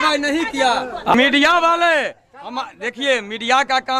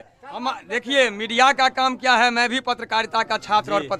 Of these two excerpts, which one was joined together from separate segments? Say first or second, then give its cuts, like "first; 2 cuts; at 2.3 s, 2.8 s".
first; 1 cut; at 1.1 s